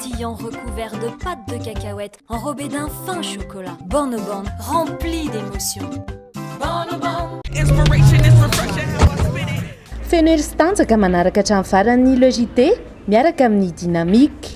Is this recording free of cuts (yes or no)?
no